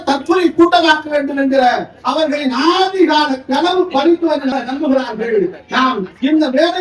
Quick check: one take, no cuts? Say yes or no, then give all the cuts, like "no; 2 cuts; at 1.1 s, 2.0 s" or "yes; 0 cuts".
no; 1 cut; at 4.5 s